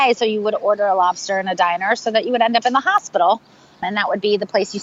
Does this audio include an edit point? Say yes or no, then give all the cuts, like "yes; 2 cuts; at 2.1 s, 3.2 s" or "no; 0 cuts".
yes; 1 cut; at 3.8 s